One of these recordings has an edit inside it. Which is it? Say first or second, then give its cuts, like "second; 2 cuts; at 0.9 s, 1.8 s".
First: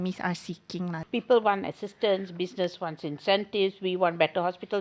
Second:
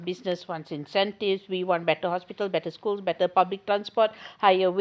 first; 1 cut; at 1.0 s